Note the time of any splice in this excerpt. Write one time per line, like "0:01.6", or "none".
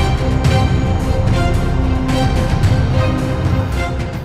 none